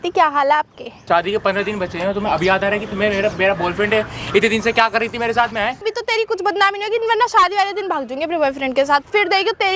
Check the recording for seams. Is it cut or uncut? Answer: cut